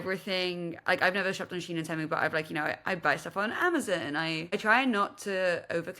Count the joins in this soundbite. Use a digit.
1